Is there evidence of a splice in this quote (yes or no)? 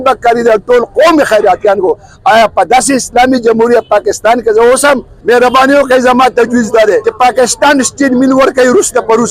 yes